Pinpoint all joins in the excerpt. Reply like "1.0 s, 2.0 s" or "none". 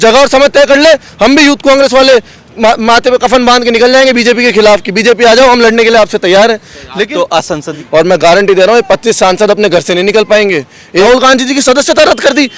7.7 s, 11.0 s